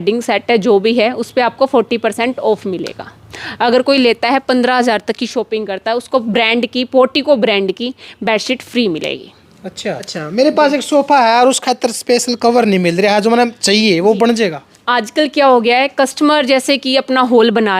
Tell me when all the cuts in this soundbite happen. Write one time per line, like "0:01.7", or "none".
0:10.0